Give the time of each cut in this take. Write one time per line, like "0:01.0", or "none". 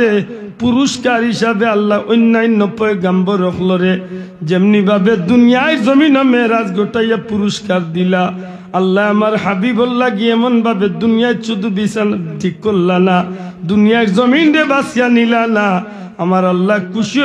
none